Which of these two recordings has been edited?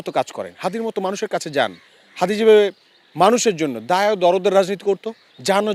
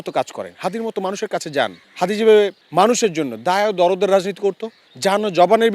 second; 2 cuts; at 1.8 s, 2.6 s

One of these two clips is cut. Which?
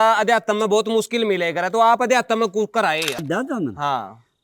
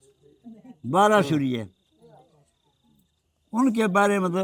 first; 1 cut; at 3.2 s

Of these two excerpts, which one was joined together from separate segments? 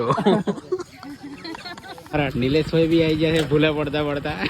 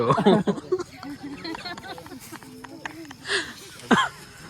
first; 1 cut; at 2.1 s

